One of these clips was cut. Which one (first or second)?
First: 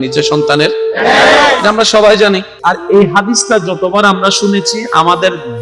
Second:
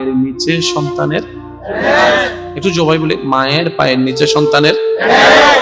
first